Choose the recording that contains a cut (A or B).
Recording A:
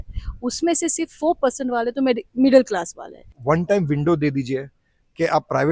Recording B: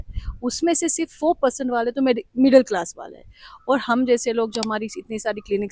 A